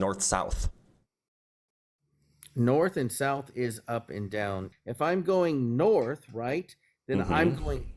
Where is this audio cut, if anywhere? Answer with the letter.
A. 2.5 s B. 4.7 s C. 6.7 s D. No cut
B